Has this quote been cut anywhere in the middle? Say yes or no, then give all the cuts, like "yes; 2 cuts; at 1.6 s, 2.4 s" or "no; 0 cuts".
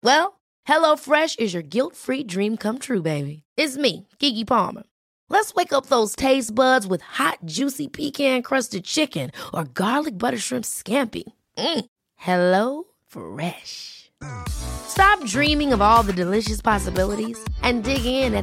no; 0 cuts